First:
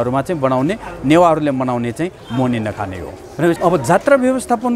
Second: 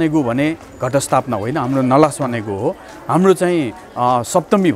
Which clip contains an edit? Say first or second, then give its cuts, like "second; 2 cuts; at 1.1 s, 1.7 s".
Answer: first; 1 cut; at 3.6 s